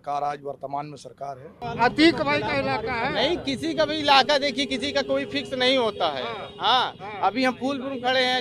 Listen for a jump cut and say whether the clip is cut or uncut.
cut